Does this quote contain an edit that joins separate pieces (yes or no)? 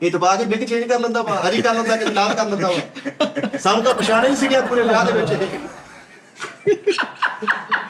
no